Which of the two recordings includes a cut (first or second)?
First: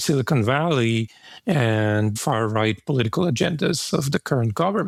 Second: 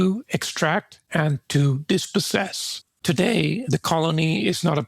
second